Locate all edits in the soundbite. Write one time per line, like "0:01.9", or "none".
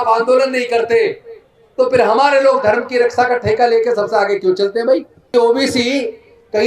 0:05.3